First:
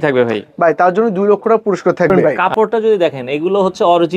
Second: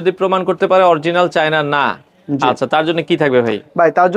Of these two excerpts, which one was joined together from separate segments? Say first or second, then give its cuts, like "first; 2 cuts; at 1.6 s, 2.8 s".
first; 1 cut; at 2.1 s